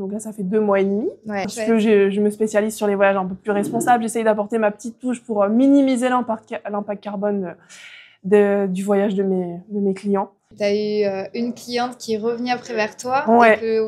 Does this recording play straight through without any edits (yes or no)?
no